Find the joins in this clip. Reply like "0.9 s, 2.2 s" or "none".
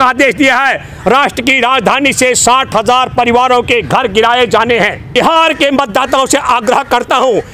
5.1 s